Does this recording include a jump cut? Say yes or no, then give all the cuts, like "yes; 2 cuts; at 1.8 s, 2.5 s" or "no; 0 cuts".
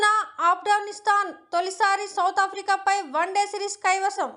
no; 0 cuts